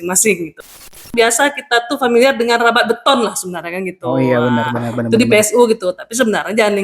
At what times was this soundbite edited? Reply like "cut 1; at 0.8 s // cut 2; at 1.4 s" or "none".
cut 1; at 1.0 s